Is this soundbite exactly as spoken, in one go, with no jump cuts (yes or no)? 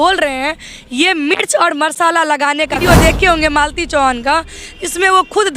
no